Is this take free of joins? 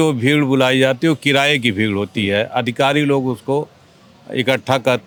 yes; 0 cuts

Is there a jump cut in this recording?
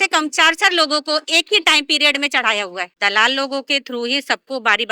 yes; 1 cut; at 2.9 s

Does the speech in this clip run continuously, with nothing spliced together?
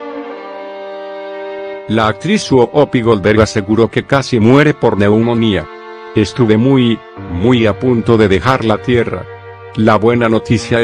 no; 1 cut; at 1.8 s

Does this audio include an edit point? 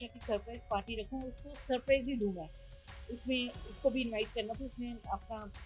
no; 0 cuts

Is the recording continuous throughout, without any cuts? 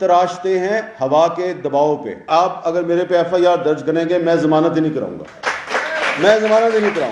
no; 1 cut; at 2.2 s

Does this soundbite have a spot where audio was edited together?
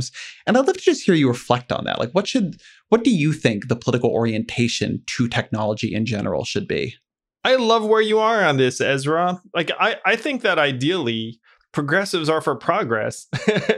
no; 0 cuts

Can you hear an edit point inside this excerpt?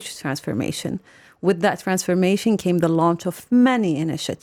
no; 0 cuts

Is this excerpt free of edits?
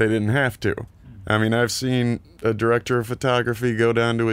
no; 1 cut; at 0.9 s

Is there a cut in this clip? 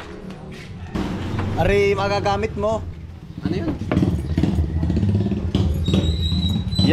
yes; 1 cut; at 0.9 s

